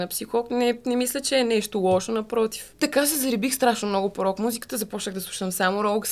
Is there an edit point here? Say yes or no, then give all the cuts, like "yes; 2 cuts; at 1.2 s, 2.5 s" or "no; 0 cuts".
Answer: yes; 1 cut; at 2.7 s